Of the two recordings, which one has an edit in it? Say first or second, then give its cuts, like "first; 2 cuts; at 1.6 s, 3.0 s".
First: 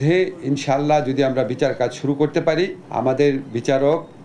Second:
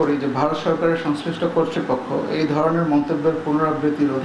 first; 1 cut; at 2.8 s